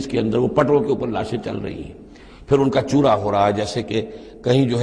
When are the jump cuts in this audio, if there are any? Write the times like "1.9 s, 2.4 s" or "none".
none